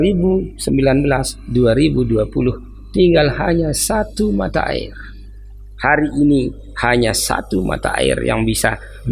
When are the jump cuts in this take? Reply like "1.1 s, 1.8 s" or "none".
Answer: none